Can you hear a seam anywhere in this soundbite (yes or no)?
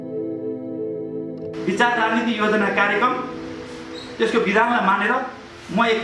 yes